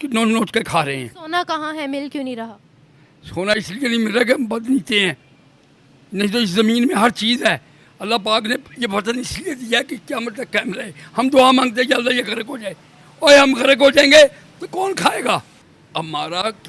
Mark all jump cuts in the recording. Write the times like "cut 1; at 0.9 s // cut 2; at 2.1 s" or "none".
none